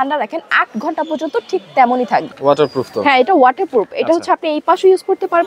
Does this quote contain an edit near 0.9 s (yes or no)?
no